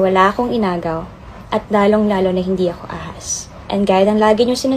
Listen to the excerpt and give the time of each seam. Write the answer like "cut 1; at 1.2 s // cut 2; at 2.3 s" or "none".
none